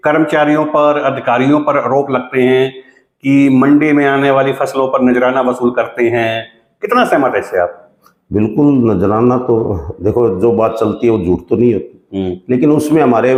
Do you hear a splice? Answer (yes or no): no